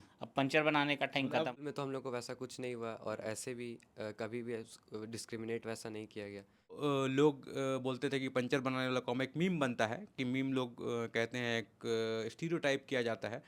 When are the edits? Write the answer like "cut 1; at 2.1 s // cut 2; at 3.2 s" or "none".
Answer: cut 1; at 1.5 s // cut 2; at 6.8 s